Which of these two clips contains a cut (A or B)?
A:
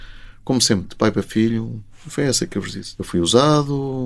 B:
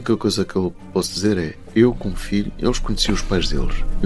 A